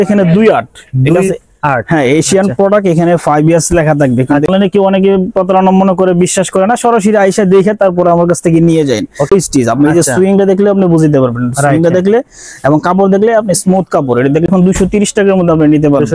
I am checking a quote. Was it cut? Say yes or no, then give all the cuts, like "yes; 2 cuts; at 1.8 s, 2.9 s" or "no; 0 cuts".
yes; 3 cuts; at 4.5 s, 9.3 s, 14.5 s